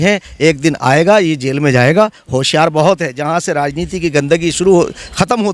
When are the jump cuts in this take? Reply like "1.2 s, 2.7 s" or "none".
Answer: none